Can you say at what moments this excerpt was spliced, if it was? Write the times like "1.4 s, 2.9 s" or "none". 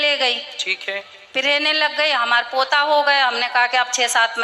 none